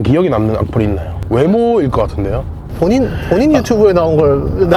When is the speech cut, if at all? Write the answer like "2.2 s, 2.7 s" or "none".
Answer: 2.6 s